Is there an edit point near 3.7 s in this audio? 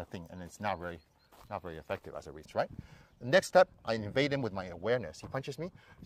no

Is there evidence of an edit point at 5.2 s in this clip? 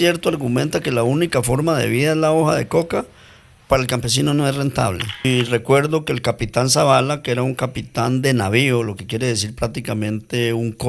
yes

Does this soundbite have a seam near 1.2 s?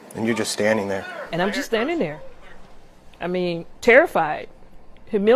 yes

